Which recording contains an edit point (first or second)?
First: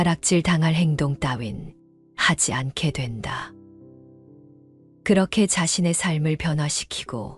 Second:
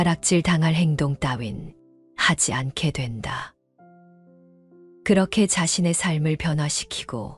first